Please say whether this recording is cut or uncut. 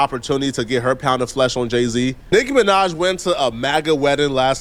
uncut